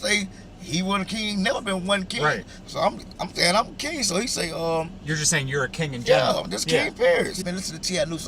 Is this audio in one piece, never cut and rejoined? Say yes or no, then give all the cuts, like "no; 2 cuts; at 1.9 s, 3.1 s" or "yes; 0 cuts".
no; 1 cut; at 7.4 s